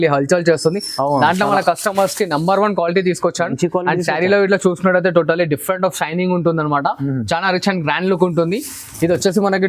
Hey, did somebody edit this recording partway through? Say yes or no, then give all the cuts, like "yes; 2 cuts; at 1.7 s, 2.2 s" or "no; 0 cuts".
no; 0 cuts